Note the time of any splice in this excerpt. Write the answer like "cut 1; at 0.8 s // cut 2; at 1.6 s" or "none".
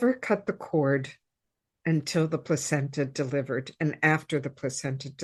none